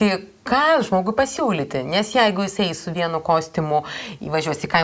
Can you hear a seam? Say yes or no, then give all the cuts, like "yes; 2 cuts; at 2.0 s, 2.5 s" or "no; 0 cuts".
no; 0 cuts